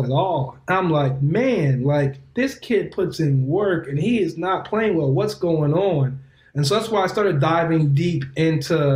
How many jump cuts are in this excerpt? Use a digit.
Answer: 0